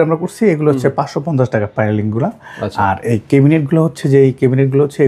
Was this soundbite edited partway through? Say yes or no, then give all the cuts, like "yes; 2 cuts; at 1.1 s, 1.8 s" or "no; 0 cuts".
no; 0 cuts